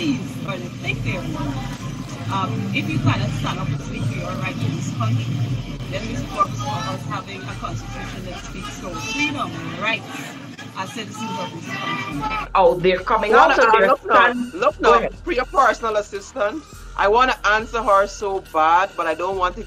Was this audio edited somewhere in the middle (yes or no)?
yes